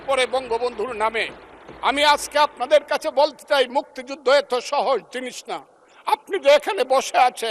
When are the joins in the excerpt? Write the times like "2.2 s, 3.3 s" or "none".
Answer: none